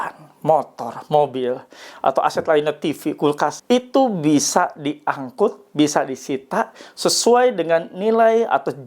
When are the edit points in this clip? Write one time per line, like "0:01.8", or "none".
0:03.6